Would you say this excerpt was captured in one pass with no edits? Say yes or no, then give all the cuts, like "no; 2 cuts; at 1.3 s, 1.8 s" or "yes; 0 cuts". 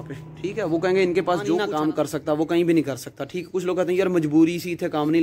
no; 1 cut; at 1.7 s